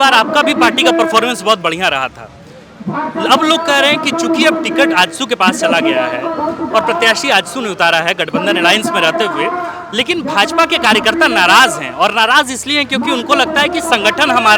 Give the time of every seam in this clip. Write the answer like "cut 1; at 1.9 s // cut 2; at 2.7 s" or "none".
none